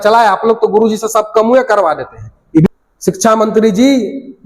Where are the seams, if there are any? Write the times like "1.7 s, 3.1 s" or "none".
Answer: 2.7 s